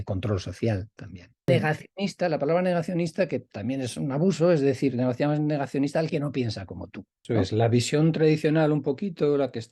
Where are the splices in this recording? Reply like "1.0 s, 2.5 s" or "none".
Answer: 1.6 s, 7.2 s